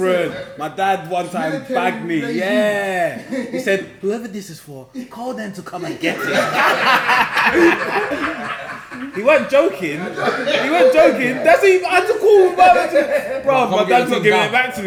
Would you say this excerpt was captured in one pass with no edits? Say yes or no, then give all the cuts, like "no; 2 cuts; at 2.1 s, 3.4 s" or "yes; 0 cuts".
yes; 0 cuts